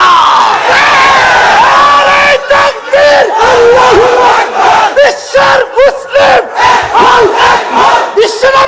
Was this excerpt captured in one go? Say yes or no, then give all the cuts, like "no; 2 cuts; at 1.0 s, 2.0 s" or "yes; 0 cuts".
yes; 0 cuts